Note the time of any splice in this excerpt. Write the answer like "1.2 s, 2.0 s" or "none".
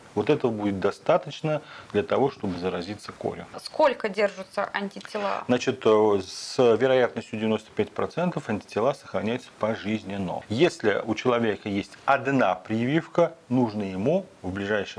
3.6 s, 10.4 s